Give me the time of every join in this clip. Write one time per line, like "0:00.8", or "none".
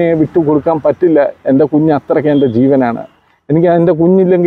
none